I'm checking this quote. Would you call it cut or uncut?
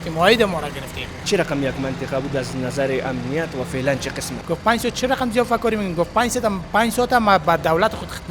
cut